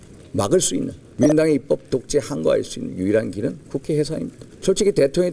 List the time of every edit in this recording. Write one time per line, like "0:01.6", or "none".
0:01.0
0:04.4